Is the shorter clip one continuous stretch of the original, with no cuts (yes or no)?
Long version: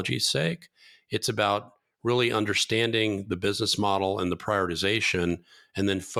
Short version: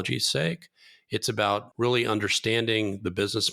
no